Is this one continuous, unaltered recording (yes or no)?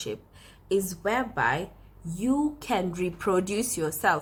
yes